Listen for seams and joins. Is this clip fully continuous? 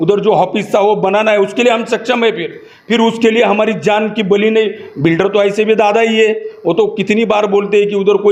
yes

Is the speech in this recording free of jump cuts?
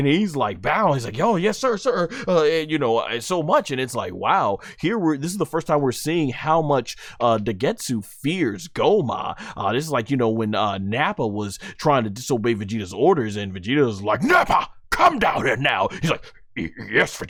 yes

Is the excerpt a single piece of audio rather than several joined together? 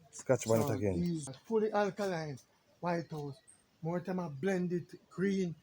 no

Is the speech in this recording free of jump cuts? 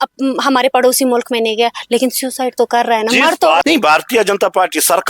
no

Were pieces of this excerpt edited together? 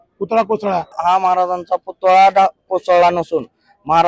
yes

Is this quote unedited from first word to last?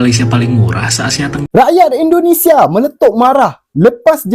no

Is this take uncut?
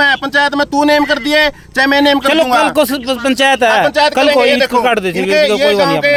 yes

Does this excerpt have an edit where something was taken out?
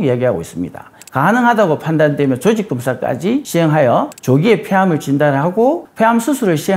yes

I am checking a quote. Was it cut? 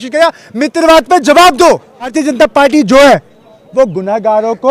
yes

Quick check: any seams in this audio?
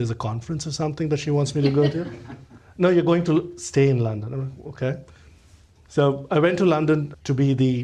no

